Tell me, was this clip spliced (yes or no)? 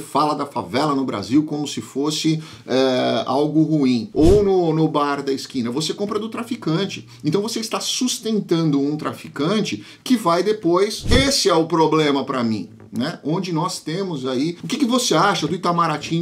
yes